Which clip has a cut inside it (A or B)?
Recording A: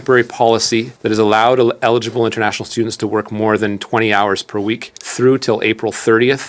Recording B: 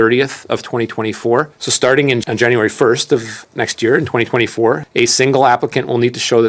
B